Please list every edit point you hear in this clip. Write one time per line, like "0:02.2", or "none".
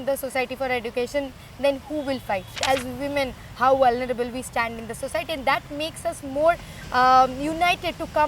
0:02.6